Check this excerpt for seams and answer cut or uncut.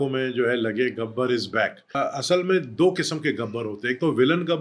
cut